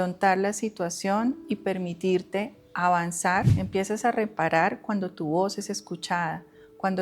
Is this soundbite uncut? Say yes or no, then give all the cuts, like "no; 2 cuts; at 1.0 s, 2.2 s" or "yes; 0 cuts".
no; 1 cut; at 3.5 s